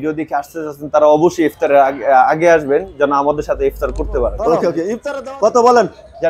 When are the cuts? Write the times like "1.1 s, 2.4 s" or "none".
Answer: 5.0 s